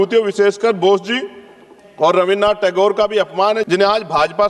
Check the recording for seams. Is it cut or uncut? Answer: uncut